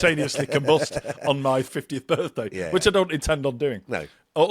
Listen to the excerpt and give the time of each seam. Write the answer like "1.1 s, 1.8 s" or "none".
1.7 s